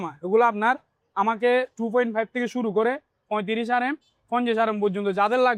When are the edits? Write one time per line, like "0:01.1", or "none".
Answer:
none